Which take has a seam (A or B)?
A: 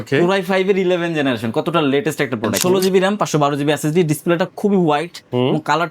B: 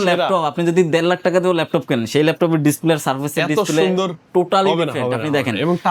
A